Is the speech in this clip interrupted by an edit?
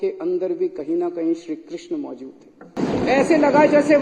yes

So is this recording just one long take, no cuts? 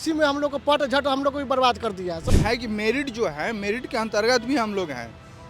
no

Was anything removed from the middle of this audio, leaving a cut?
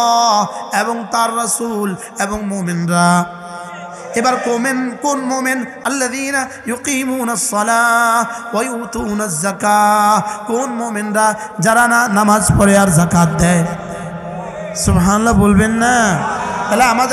yes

